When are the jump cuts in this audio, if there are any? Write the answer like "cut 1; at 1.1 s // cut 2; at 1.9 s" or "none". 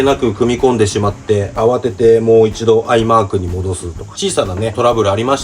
cut 1; at 1.5 s

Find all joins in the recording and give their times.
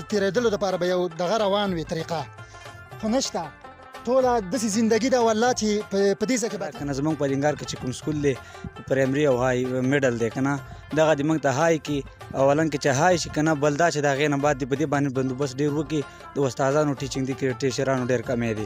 cut 1; at 6.7 s

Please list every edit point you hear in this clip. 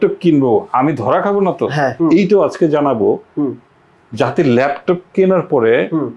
cut 1; at 2.0 s

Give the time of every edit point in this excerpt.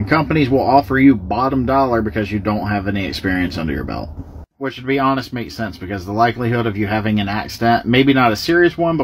none

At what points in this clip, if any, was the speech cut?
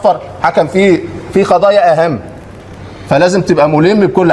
none

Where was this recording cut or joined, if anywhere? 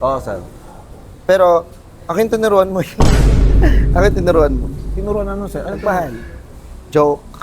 none

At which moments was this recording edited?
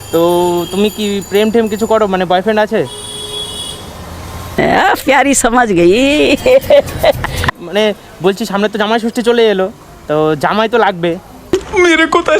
cut 1; at 7.6 s // cut 2; at 11.3 s

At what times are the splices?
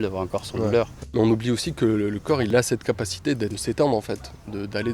cut 1; at 1.0 s // cut 2; at 2.5 s // cut 3; at 3.6 s

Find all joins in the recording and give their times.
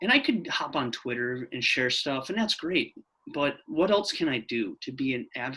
none

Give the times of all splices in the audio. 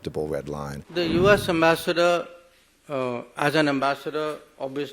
cut 1; at 1.0 s

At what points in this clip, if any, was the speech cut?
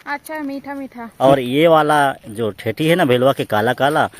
cut 1; at 1.0 s

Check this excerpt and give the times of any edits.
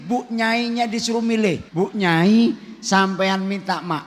cut 1; at 1.6 s

